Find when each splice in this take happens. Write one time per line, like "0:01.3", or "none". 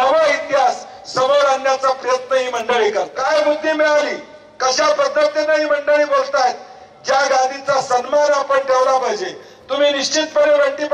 0:03.1